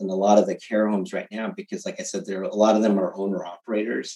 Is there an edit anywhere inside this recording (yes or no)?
no